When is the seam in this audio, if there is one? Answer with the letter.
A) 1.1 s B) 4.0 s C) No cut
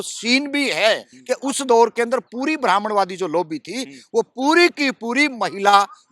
A